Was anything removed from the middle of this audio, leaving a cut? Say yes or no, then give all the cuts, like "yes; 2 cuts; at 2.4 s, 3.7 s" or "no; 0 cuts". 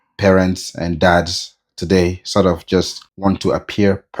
yes; 1 cut; at 3.0 s